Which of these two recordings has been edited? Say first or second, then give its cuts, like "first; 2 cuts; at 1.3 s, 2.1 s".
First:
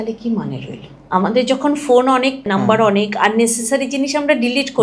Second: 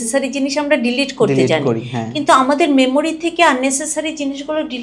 first; 2 cuts; at 0.9 s, 2.5 s